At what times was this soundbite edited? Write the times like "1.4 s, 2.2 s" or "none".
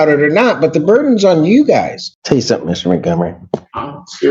2.0 s

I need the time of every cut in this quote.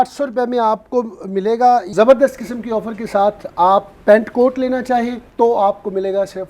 1.9 s, 5.2 s

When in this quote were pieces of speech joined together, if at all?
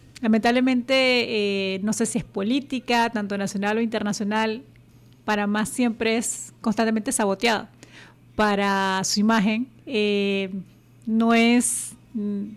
none

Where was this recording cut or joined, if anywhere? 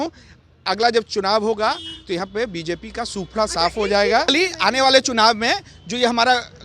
4.3 s

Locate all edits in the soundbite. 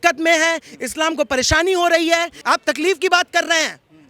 2.3 s

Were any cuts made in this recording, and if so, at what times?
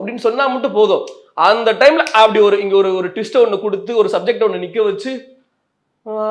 none

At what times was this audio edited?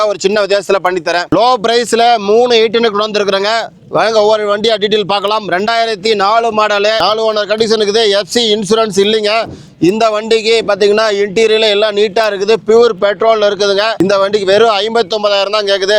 none

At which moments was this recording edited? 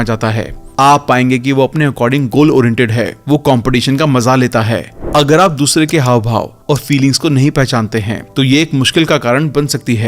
4.9 s

